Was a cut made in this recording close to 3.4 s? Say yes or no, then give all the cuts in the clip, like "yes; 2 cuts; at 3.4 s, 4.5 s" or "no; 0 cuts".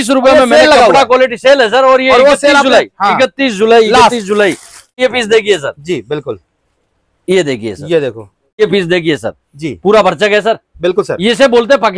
no; 2 cuts; at 5.0 s, 8.6 s